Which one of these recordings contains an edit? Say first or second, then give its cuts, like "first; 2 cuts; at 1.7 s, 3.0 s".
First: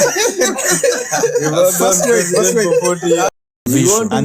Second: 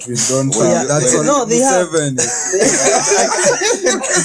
first; 1 cut; at 3.3 s